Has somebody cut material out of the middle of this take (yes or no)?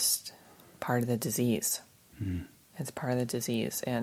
no